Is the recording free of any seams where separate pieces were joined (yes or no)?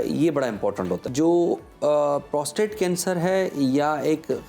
no